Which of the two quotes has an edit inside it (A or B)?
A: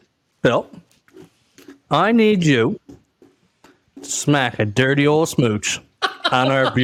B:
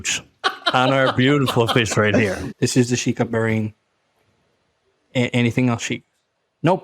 B